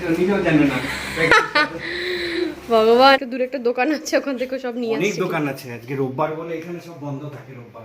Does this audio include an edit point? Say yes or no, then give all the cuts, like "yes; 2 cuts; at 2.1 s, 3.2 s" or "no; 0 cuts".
yes; 1 cut; at 3.2 s